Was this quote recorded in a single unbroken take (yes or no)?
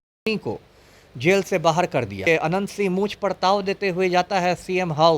no